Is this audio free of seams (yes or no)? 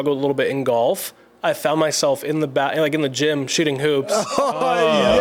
yes